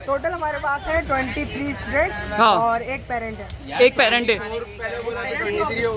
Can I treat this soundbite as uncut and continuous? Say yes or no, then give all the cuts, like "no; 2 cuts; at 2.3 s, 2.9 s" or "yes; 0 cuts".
yes; 0 cuts